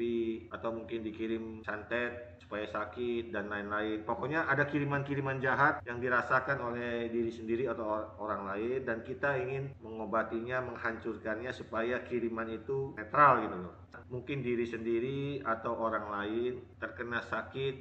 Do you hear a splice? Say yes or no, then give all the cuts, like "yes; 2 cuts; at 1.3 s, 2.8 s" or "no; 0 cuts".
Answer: yes; 1 cut; at 13.9 s